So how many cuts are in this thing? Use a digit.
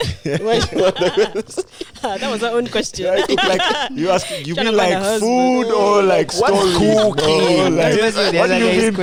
0